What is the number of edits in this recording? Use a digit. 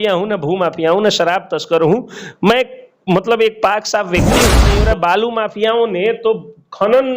1